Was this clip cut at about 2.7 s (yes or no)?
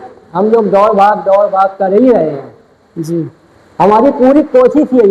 no